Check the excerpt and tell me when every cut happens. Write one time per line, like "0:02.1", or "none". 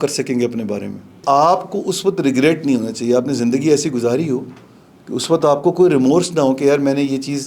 0:01.2